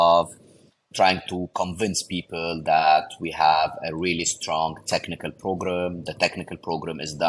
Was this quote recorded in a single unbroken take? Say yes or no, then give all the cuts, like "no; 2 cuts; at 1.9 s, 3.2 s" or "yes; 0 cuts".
yes; 0 cuts